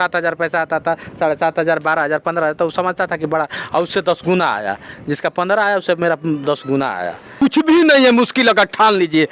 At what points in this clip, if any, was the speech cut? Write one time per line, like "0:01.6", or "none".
0:07.2